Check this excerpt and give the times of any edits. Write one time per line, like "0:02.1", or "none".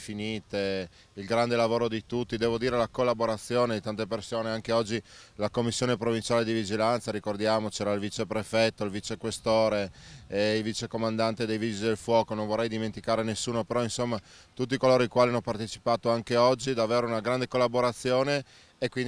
none

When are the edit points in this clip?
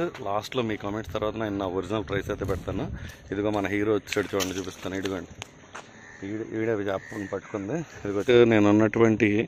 0:08.2

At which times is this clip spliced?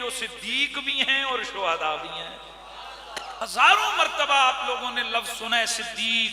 0:03.4

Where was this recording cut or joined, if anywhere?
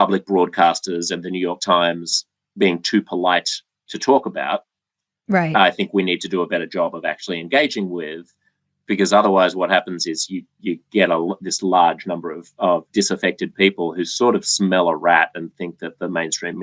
none

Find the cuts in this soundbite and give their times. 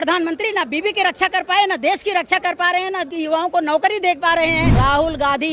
0:03.1
0:04.7

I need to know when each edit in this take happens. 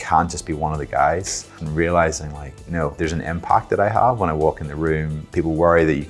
0:01.6
0:02.9
0:05.2

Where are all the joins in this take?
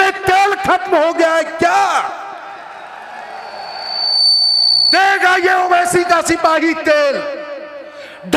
none

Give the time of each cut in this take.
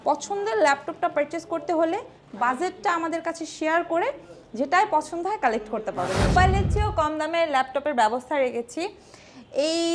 0:06.3

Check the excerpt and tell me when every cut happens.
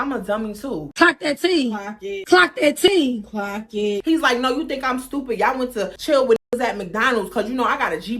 0:04.0
0:06.0

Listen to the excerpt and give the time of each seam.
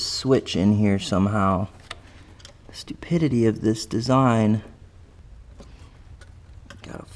0:05.2

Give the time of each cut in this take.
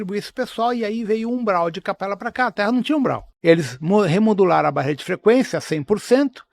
0:03.3

